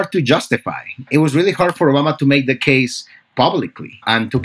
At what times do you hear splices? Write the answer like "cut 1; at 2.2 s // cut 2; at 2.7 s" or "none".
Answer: cut 1; at 1.1 s